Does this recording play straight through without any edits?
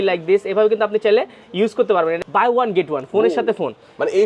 no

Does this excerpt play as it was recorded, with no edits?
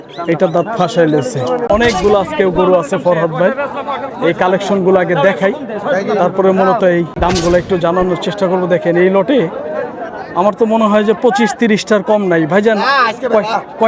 no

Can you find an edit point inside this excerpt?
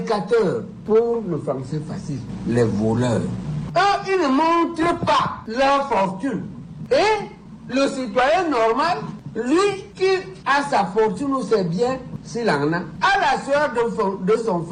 no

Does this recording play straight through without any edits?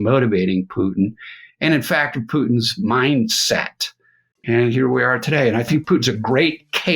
no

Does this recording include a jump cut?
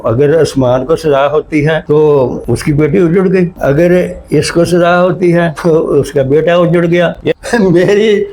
yes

